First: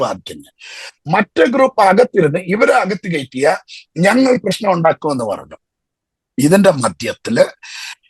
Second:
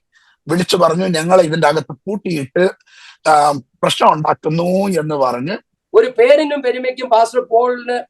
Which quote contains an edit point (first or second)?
second